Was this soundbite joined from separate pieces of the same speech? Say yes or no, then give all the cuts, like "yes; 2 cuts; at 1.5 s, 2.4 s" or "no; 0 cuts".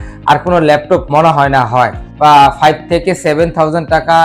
yes; 1 cut; at 2.0 s